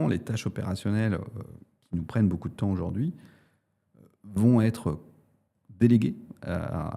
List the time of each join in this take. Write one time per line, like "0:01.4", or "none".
none